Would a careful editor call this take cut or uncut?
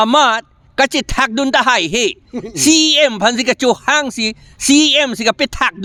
uncut